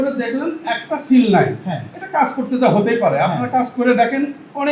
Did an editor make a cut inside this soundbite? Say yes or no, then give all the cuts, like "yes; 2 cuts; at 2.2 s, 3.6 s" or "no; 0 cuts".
no; 0 cuts